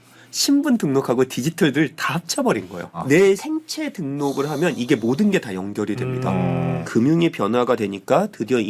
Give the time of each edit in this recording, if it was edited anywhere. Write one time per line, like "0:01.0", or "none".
0:03.4
0:06.8